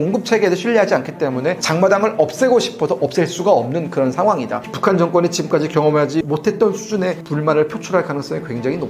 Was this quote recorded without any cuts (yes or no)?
no